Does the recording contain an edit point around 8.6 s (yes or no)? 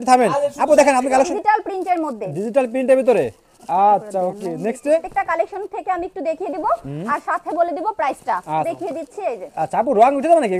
yes